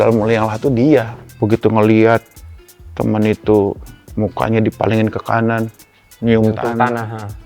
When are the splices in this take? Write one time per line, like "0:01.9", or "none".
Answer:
0:01.2